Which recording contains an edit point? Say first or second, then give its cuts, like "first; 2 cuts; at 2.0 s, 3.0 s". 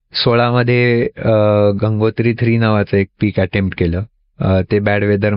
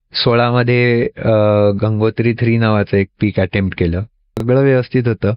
second; 1 cut; at 4.4 s